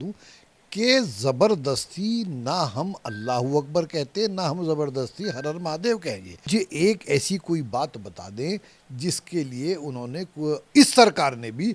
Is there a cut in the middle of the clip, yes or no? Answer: yes